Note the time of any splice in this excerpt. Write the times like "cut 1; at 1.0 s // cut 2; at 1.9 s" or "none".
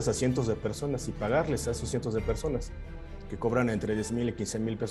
none